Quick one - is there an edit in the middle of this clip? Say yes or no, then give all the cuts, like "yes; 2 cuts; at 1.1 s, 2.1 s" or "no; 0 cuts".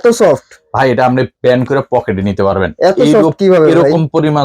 no; 0 cuts